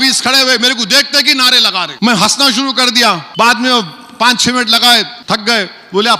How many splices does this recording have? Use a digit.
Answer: 3